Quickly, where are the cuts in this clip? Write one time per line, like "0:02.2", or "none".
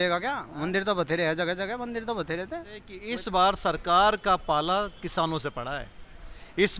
0:02.9